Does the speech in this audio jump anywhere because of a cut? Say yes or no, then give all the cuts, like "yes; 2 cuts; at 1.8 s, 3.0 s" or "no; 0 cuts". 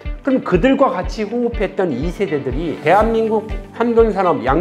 yes; 1 cut; at 2.8 s